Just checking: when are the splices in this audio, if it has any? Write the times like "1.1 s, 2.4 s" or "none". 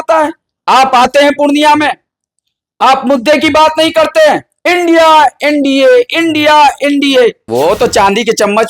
7.4 s